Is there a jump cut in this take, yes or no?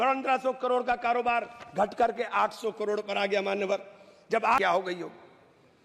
yes